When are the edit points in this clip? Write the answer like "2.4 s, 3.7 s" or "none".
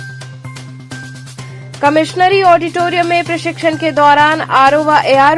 1.3 s